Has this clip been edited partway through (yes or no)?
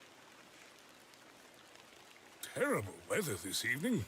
yes